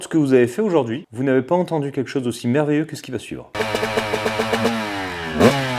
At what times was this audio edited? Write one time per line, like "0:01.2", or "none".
0:01.0
0:03.6